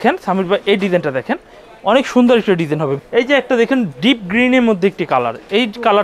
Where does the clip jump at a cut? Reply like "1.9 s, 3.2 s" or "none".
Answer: 2.9 s

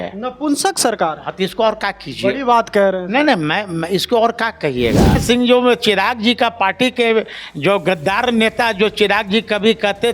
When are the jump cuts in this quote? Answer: 5.2 s

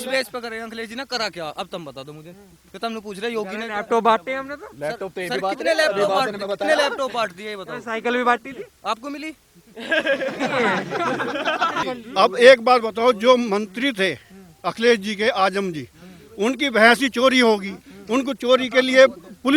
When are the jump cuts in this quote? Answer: 11.8 s

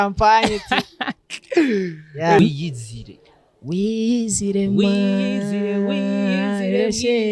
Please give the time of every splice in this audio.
2.4 s

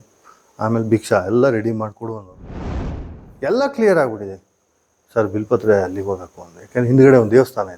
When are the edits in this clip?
2.7 s

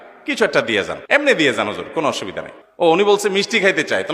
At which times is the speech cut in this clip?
1.0 s, 2.6 s

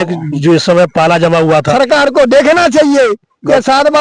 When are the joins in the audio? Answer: 1.7 s

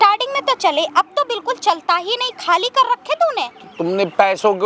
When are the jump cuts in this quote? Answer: none

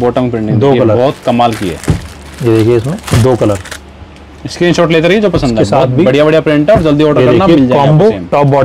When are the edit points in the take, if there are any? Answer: none

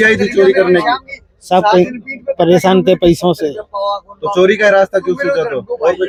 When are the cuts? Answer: none

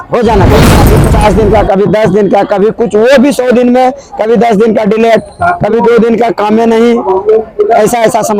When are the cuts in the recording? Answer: 0.9 s

